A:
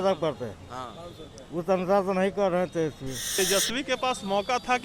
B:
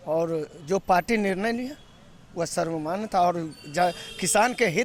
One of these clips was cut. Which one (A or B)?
A